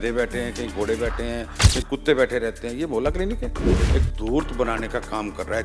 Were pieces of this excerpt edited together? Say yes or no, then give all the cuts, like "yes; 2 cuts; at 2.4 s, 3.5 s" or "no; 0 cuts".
yes; 1 cut; at 3.8 s